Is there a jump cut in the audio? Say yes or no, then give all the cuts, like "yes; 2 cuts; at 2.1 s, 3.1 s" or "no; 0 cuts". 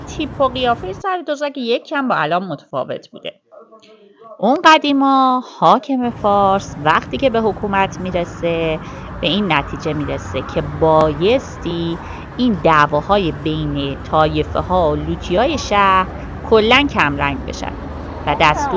no; 0 cuts